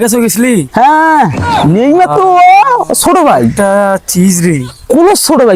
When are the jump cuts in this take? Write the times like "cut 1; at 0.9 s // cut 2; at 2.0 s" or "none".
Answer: none